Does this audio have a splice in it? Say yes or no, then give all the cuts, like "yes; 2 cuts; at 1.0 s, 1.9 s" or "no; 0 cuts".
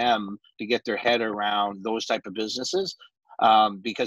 no; 0 cuts